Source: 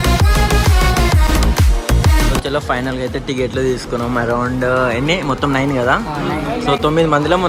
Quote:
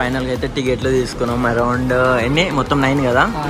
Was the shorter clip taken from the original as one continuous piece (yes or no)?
yes